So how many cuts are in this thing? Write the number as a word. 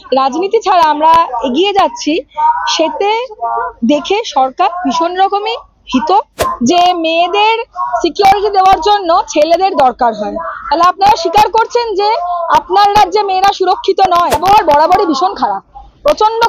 two